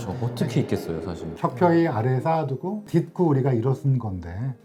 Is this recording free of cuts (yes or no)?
yes